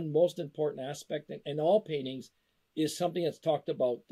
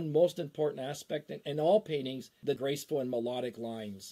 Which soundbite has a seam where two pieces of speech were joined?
second; 1 cut; at 2.5 s

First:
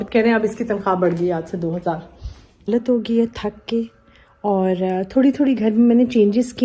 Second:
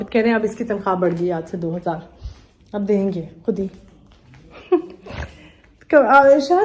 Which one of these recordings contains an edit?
first; 1 cut; at 2.7 s

